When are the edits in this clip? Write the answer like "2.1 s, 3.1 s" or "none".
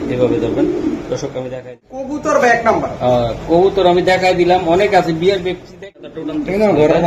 1.8 s, 5.9 s